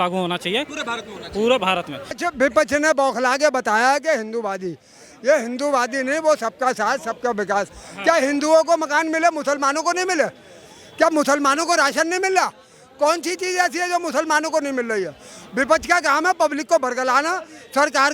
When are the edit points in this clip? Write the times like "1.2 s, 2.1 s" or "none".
2.1 s